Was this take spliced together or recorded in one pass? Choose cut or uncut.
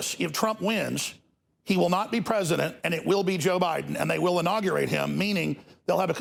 uncut